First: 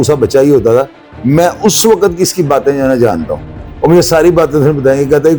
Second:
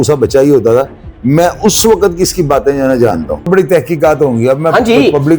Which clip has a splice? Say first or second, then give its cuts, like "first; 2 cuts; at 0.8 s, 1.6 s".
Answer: second; 1 cut; at 3.5 s